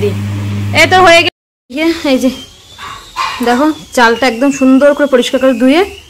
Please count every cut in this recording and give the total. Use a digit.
1